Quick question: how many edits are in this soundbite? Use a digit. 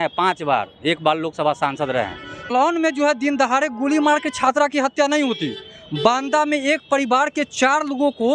1